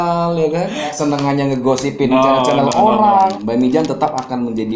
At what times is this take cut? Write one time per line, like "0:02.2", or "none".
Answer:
0:00.9
0:03.3